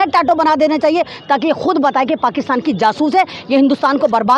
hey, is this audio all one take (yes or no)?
yes